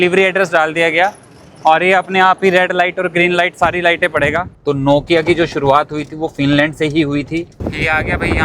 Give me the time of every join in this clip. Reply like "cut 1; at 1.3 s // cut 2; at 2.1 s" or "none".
cut 1; at 4.5 s // cut 2; at 7.5 s

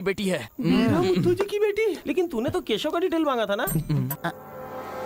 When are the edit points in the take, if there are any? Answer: cut 1; at 4.1 s

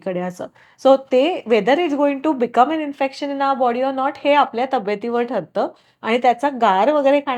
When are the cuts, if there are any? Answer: none

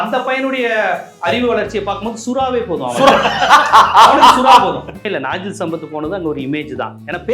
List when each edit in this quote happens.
cut 1; at 5.0 s

